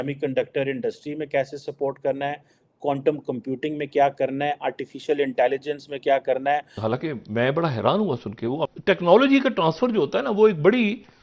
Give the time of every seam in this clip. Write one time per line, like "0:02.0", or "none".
0:06.8
0:08.6